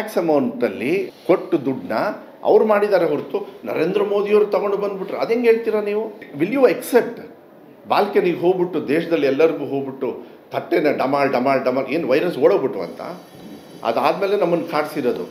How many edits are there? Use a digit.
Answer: 2